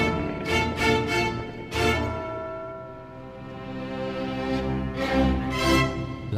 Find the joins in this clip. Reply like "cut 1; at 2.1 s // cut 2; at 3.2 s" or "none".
cut 1; at 1.2 s